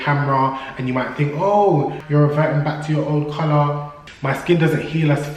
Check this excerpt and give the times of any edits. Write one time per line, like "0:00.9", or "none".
0:02.0
0:04.0